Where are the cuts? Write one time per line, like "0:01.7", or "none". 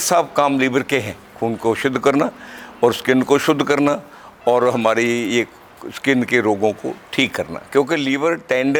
none